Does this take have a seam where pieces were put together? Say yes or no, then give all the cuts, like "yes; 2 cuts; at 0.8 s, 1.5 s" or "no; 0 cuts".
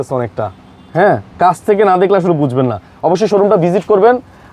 no; 0 cuts